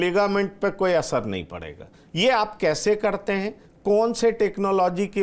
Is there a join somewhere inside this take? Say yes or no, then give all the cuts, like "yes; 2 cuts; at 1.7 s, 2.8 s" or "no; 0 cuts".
no; 0 cuts